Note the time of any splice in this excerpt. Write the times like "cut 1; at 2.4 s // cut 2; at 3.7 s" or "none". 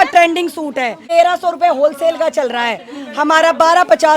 cut 1; at 1.0 s

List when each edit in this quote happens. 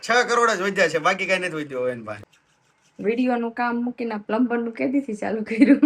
cut 1; at 2.1 s

